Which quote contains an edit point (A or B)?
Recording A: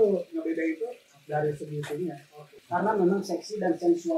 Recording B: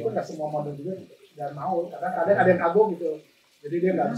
A